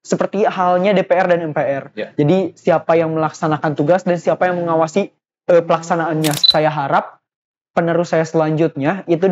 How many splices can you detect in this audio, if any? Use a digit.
1